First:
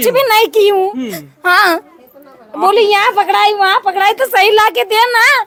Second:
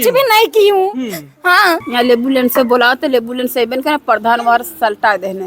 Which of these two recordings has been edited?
second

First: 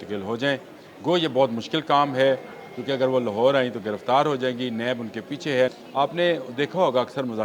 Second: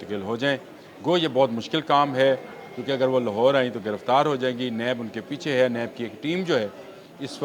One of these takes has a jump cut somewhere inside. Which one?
first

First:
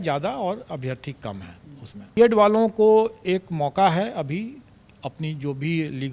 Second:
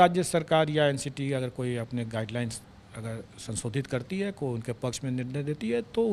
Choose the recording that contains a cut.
first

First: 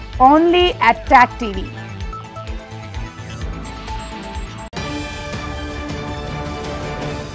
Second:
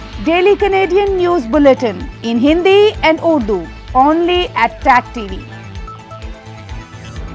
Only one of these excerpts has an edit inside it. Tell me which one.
first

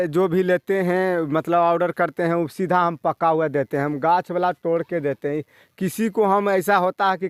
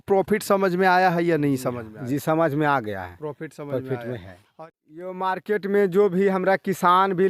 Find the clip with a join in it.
second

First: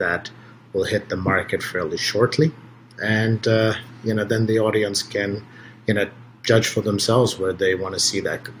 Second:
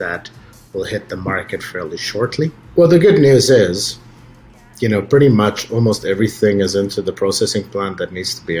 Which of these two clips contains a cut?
second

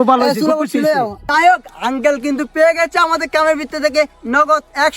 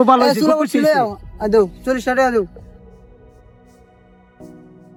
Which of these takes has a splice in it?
first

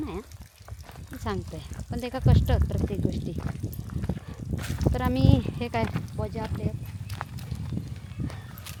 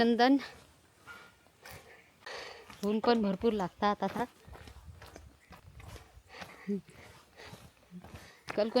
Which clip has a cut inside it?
second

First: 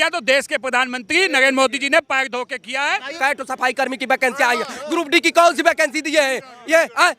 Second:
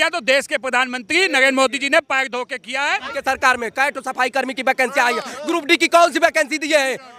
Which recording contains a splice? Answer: first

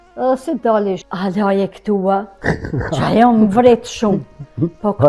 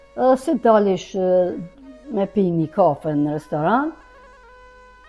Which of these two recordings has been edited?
first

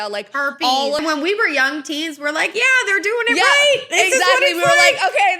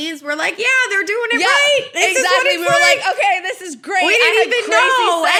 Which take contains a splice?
first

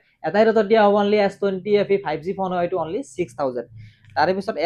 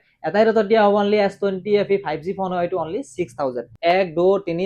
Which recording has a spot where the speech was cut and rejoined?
second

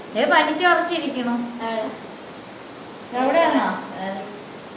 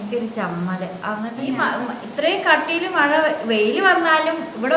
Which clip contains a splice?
second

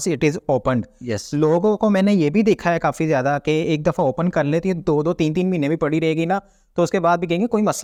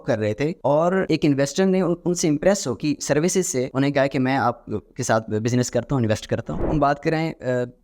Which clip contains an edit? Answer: second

